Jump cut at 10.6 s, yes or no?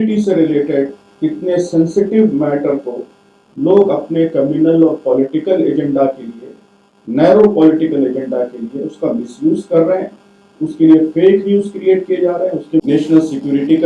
no